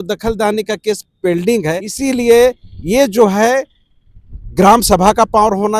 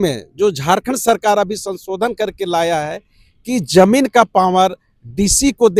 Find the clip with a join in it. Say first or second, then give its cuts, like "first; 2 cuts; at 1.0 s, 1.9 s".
first; 1 cut; at 1.9 s